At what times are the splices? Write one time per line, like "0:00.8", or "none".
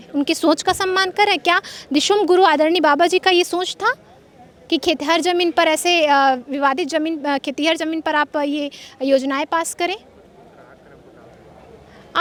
none